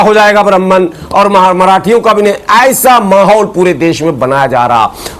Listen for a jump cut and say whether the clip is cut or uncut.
uncut